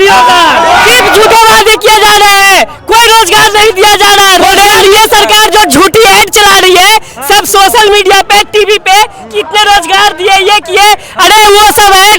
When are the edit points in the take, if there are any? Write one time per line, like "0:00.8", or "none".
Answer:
0:01.0
0:04.4